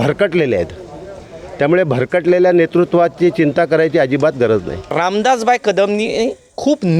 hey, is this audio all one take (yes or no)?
no